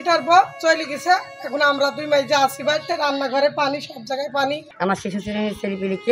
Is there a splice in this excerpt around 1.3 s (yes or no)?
no